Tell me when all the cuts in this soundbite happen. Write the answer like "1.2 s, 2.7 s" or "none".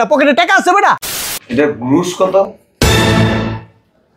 1.2 s